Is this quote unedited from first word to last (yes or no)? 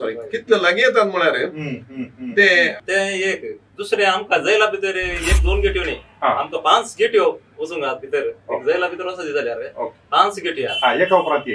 no